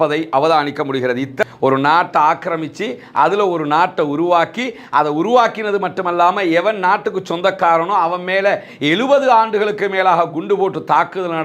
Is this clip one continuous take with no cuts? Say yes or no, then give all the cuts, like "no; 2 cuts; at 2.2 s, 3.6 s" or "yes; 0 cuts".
no; 1 cut; at 1.4 s